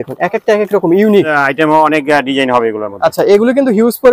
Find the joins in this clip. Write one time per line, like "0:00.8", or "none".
0:01.3